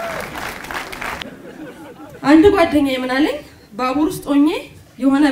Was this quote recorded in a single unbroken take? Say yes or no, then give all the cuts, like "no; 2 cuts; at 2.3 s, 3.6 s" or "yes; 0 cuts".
no; 1 cut; at 1.3 s